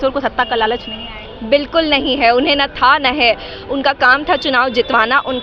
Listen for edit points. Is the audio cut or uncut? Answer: uncut